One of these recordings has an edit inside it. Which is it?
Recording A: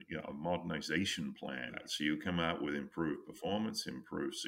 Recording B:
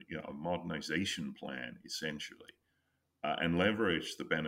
A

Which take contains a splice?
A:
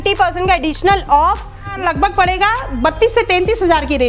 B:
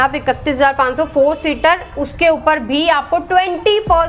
A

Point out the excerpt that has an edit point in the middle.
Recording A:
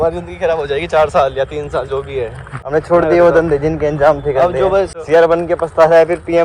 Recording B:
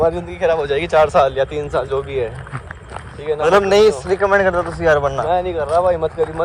A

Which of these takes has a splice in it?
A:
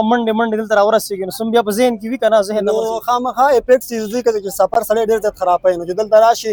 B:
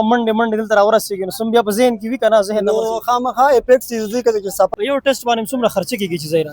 B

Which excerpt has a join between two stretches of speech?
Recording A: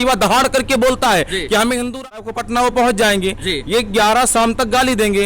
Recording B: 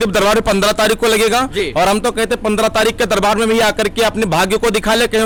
A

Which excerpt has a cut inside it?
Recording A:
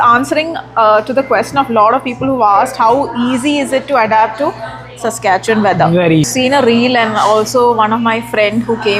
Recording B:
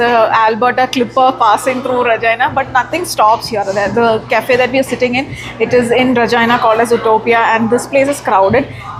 A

